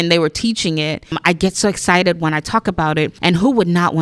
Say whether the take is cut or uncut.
cut